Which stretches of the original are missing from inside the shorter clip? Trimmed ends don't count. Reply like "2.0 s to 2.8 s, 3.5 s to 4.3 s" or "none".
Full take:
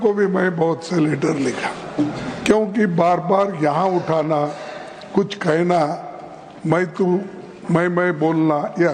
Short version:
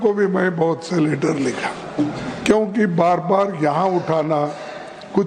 none

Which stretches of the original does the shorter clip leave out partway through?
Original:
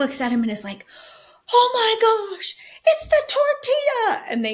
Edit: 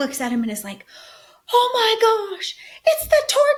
none

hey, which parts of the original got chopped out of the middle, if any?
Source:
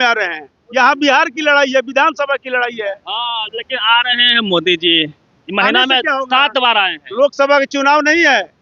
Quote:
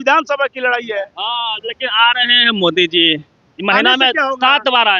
none

